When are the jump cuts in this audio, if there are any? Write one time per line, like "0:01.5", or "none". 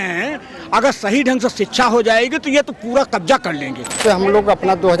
0:04.0